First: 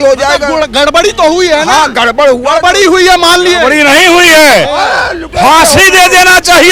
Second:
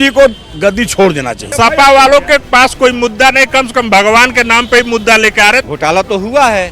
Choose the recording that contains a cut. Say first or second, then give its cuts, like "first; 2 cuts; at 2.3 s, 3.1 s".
second; 2 cuts; at 1.4 s, 5.7 s